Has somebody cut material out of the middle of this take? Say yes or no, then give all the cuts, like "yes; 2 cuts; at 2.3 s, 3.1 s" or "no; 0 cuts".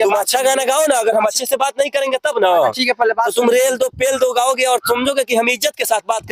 no; 0 cuts